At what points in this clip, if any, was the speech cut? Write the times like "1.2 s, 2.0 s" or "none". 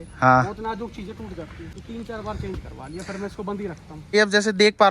1.8 s, 4.1 s